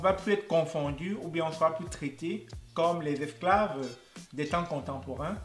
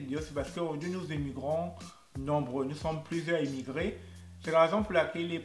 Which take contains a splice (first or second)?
second